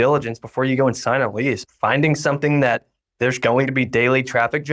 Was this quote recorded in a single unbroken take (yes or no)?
no